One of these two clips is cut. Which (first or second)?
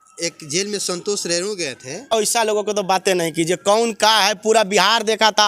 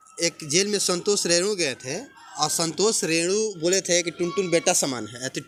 first